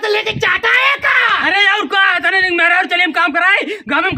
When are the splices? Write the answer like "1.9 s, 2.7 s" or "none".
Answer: none